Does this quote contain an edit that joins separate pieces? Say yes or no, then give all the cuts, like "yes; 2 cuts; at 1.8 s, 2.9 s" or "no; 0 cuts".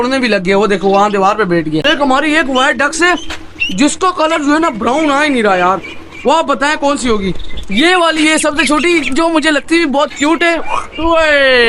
yes; 1 cut; at 1.8 s